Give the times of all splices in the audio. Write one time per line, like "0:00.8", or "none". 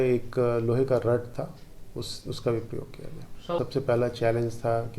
0:03.6